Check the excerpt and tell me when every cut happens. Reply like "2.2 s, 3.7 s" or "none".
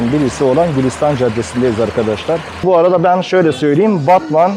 2.6 s